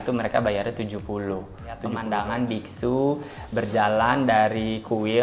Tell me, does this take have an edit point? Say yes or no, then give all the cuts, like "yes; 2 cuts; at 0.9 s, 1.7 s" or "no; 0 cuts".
yes; 1 cut; at 2.0 s